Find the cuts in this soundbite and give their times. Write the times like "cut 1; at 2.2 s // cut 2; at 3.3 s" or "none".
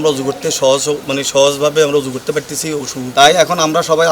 cut 1; at 3.0 s